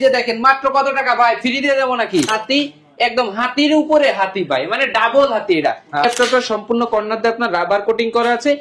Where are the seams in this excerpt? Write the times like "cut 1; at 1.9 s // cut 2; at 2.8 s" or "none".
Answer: cut 1; at 2.3 s // cut 2; at 6.0 s